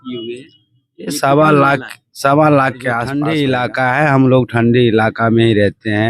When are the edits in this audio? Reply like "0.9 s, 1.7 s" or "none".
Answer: 3.1 s